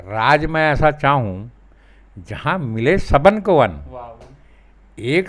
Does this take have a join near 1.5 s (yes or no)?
no